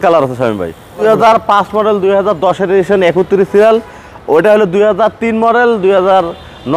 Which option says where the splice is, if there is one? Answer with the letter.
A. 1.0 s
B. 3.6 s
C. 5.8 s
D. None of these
A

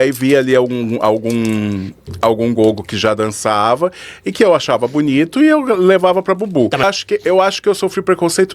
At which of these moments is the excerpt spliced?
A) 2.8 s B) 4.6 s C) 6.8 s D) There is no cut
C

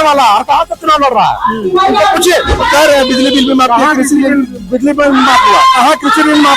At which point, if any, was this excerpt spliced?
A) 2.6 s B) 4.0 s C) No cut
A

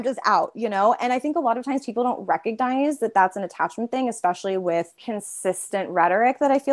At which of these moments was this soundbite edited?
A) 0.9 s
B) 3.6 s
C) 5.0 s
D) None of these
C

